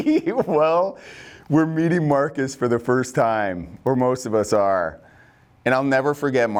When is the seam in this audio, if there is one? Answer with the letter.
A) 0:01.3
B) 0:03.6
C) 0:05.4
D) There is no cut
D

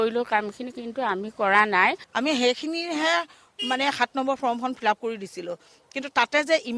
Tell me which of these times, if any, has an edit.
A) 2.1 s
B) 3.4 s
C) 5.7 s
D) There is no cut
A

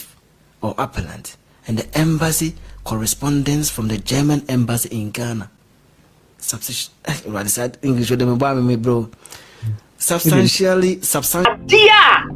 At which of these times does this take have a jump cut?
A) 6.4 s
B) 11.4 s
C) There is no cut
B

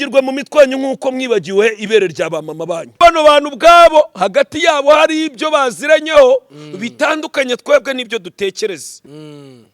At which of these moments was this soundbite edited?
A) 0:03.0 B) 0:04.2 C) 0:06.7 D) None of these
A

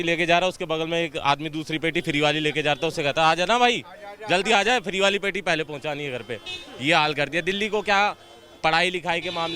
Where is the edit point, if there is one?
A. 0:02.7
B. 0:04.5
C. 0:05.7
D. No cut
D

